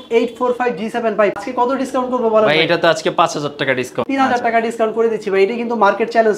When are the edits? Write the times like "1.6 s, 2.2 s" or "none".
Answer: 1.4 s, 4.0 s